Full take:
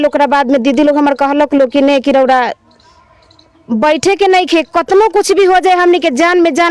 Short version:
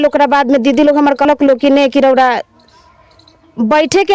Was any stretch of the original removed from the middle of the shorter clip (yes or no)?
yes